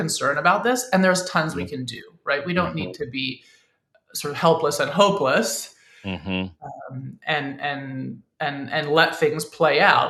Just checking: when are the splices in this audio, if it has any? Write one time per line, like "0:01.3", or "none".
none